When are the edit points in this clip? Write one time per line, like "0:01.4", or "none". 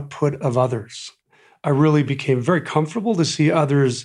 0:01.1

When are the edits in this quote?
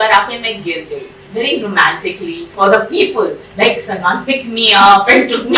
0:01.2
0:02.5

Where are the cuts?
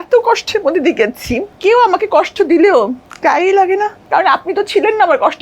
0:01.5
0:03.1
0:04.0

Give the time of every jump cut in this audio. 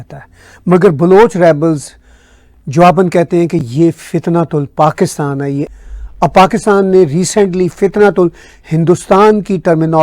0:05.7

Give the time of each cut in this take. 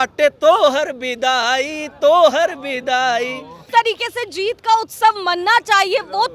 0:03.6

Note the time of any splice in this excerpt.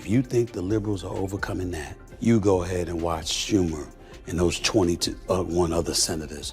0:02.0

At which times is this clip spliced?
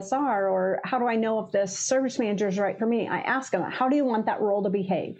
none

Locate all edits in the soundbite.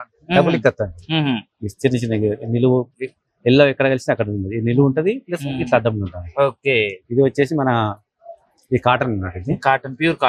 none

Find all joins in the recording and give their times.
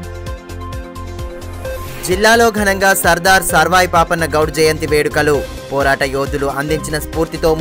0:01.4

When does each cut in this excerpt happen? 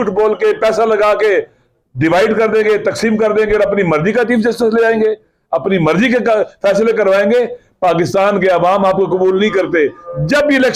none

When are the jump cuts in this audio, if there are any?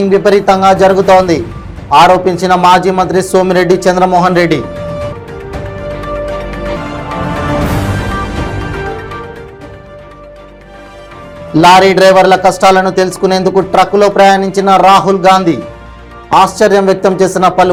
none

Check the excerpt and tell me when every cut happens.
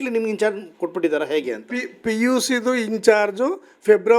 none

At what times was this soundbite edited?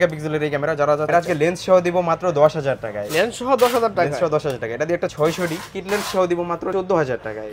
0:01.1
0:05.1
0:06.7

